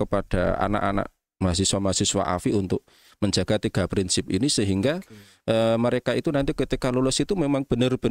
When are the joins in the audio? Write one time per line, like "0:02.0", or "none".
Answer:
none